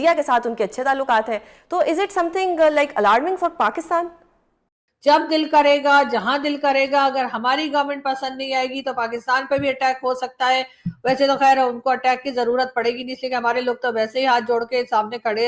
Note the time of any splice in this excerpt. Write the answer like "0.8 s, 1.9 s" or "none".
4.8 s